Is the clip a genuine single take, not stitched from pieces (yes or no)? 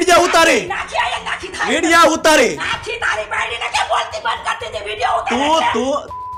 yes